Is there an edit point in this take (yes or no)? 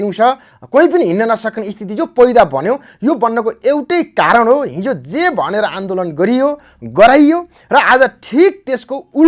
no